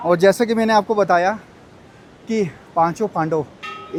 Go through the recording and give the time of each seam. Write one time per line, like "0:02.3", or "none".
none